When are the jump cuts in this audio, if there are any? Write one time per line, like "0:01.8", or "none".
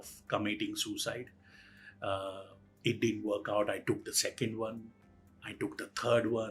none